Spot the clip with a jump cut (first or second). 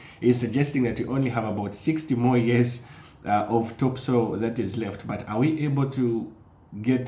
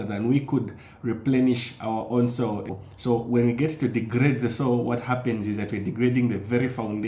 second